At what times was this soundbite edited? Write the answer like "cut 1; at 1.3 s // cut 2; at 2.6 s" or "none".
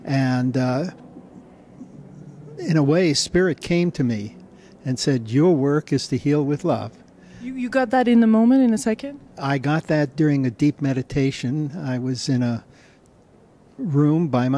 cut 1; at 1.9 s